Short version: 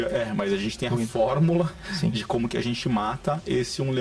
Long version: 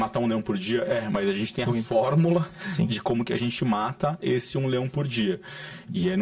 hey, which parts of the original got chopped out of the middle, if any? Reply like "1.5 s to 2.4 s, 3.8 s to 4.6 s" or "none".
none